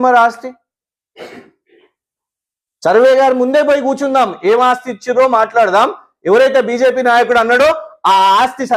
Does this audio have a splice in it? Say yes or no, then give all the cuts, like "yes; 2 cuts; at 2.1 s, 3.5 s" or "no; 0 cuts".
no; 0 cuts